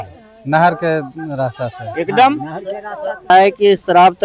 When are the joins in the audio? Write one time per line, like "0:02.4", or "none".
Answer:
0:03.3